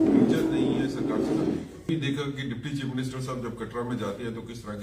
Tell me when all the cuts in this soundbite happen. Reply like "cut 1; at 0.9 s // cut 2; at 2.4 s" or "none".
cut 1; at 1.9 s